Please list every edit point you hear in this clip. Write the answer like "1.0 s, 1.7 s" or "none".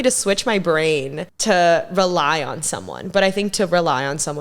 none